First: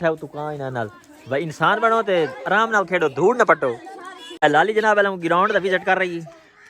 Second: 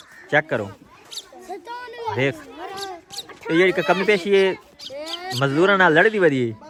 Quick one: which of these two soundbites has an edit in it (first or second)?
first